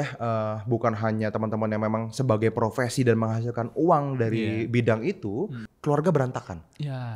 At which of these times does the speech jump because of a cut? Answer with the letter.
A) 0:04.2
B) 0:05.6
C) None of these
B